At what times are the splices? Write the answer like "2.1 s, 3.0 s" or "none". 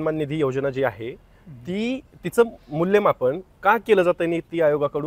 none